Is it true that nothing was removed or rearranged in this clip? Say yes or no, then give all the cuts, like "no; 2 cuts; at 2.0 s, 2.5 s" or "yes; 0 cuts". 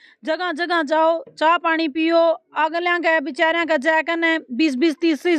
yes; 0 cuts